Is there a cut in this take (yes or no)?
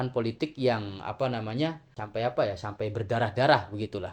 yes